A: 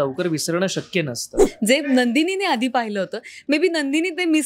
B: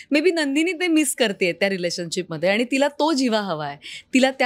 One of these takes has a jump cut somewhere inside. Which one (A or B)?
A